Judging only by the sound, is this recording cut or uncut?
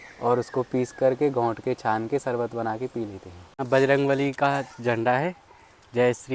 cut